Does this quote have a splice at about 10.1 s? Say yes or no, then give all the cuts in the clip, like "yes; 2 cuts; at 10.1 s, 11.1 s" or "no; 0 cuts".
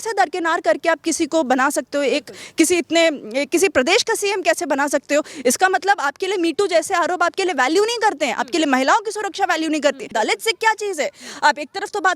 yes; 1 cut; at 10.1 s